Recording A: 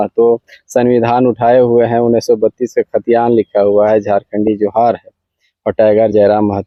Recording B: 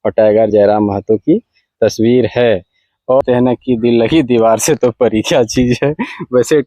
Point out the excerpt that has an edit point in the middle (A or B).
B